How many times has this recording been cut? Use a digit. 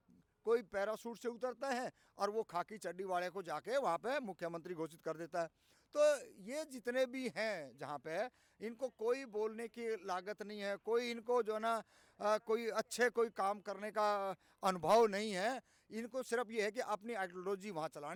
0